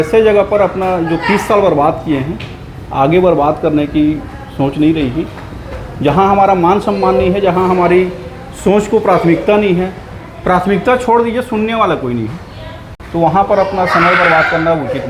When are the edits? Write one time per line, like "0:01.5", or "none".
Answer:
none